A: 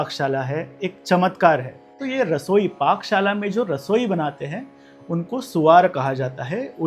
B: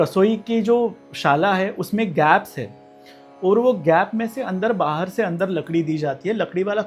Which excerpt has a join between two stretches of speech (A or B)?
A